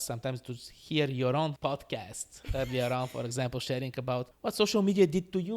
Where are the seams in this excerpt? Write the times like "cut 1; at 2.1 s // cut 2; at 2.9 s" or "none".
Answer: cut 1; at 1.6 s // cut 2; at 4.3 s

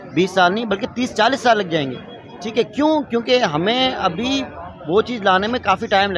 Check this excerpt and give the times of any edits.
none

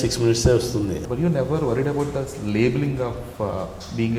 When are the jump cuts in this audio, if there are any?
cut 1; at 1.0 s

